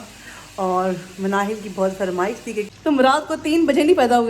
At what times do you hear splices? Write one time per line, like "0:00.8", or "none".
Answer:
0:02.7